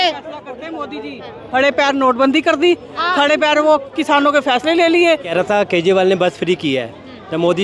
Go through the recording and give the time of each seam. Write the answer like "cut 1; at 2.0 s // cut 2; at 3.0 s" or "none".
cut 1; at 5.3 s